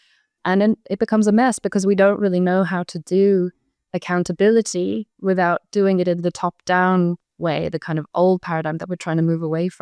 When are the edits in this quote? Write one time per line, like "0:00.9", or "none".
none